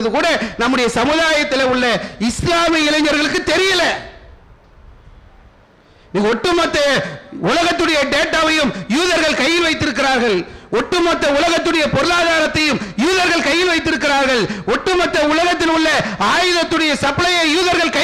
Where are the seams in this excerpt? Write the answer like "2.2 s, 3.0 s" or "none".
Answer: none